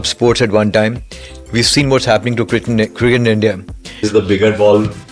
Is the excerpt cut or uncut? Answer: cut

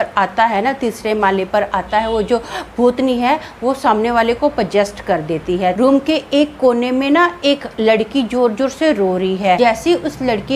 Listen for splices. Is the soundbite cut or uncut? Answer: cut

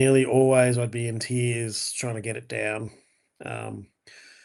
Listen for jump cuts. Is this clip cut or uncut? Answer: uncut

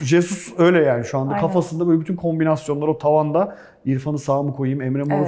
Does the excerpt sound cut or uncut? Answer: uncut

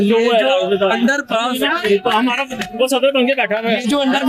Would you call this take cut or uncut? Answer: uncut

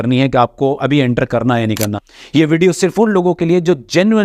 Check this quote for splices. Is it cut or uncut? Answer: cut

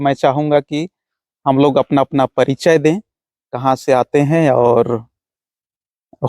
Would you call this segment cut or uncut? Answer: uncut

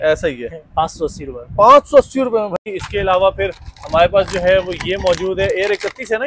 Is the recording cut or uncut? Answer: cut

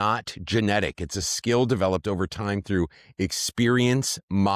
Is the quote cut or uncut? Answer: uncut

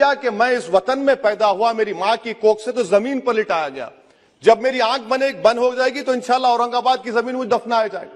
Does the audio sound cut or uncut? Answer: uncut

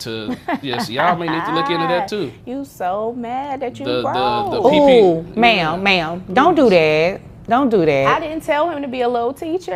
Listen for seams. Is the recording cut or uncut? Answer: uncut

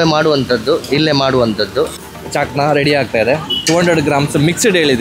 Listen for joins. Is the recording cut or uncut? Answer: cut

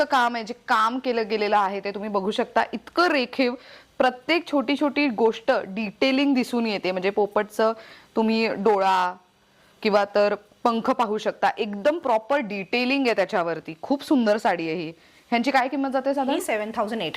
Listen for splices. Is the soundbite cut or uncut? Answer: uncut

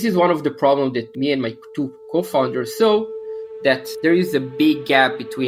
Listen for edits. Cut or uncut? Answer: uncut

